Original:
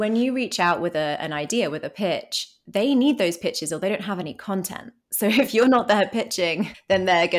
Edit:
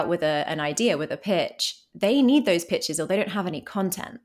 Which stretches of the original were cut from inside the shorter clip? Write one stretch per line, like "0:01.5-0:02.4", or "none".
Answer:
none

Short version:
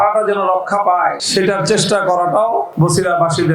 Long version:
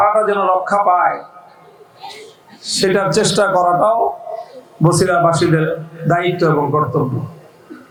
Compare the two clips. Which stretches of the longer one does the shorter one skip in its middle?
0:01.2-0:02.7
0:04.2-0:04.7

